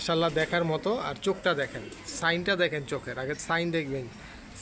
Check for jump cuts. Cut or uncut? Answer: uncut